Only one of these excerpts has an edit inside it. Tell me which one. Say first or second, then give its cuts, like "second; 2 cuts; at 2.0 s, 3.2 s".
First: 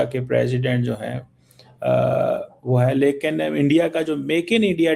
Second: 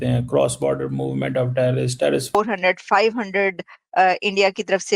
second; 1 cut; at 2.4 s